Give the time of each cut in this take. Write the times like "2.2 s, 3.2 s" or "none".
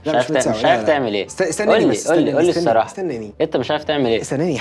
none